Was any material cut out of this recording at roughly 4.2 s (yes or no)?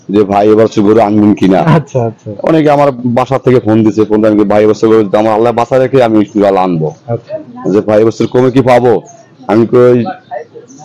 no